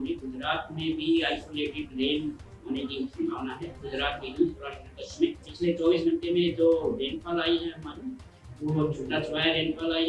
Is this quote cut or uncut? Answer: cut